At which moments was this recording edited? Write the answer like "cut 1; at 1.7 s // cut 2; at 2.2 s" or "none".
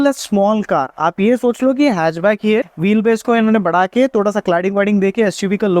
cut 1; at 2.6 s